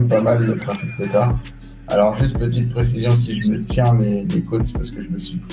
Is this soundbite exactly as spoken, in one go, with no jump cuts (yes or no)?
yes